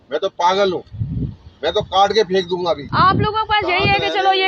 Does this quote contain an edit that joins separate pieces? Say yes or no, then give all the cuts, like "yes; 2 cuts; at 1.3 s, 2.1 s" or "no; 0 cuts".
yes; 1 cut; at 2.9 s